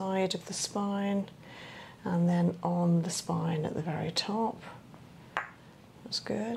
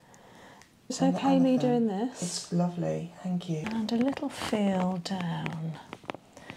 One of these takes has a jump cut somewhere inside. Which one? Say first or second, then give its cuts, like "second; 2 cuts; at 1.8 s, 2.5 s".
second; 2 cuts; at 1.0 s, 3.6 s